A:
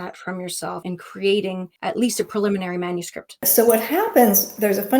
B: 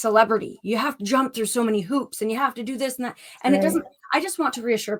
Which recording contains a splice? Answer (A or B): A